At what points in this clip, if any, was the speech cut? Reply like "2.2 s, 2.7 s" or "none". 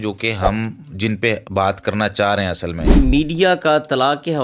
3.0 s